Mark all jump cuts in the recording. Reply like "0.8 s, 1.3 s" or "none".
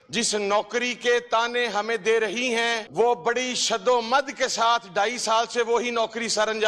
2.9 s